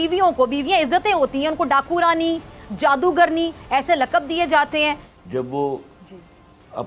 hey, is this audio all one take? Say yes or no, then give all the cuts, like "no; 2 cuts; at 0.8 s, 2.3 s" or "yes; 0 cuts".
no; 1 cut; at 5.0 s